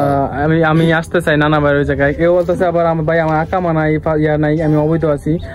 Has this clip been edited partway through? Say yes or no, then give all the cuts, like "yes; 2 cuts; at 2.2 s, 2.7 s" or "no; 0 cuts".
no; 0 cuts